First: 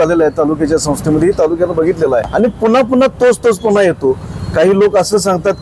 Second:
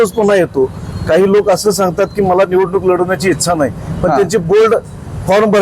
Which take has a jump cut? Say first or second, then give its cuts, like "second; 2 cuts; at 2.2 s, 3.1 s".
first; 1 cut; at 2.3 s